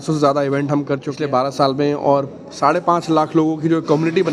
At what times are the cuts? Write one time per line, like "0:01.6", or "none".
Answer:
0:01.0